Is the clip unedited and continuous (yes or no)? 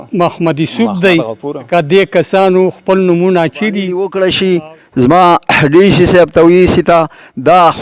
no